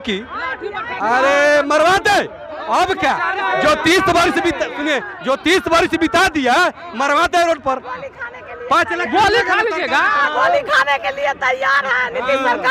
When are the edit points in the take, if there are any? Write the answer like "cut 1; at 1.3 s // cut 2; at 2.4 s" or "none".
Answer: none